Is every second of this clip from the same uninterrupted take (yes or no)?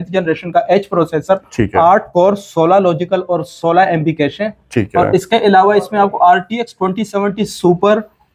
yes